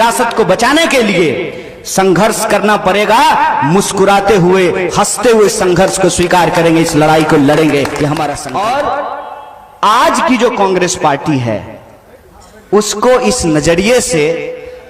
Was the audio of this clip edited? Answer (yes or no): yes